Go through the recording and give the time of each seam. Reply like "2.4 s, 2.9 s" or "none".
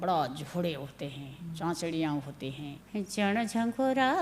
2.7 s